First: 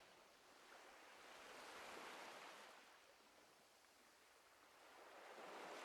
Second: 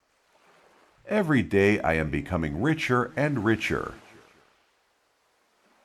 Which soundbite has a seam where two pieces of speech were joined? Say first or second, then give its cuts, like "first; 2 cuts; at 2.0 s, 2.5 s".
second; 2 cuts; at 1.0 s, 4.4 s